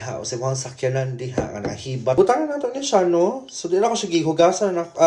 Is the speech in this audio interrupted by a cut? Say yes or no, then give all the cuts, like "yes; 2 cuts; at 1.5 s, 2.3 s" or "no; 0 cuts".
yes; 1 cut; at 2.2 s